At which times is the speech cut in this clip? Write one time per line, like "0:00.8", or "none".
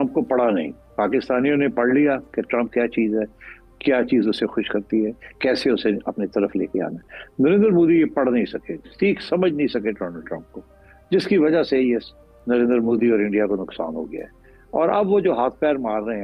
none